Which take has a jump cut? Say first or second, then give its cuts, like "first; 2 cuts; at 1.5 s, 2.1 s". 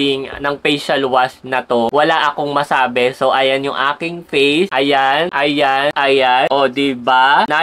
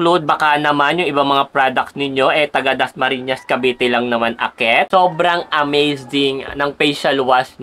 second; 1 cut; at 4.9 s